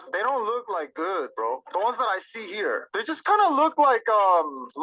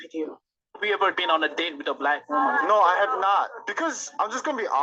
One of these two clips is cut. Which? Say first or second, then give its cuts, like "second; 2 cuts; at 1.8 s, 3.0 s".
second; 1 cut; at 3.1 s